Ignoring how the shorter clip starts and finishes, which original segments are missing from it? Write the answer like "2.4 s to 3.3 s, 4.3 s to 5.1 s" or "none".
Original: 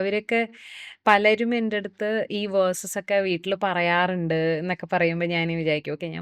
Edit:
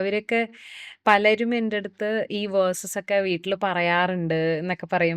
none